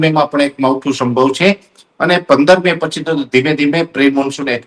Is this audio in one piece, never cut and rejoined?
yes; 0 cuts

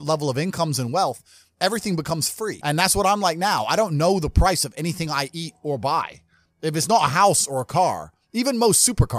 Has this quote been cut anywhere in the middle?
yes; 1 cut; at 2.6 s

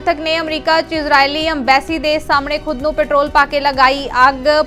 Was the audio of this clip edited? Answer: no; 0 cuts

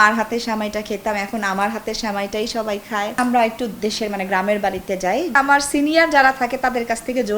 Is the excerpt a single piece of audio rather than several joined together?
no; 2 cuts; at 3.1 s, 5.3 s

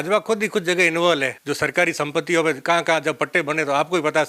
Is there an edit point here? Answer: yes; 1 cut; at 1.3 s

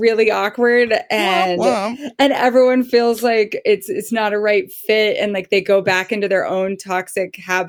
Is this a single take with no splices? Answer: yes; 0 cuts

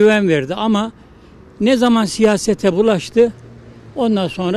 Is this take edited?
no; 0 cuts

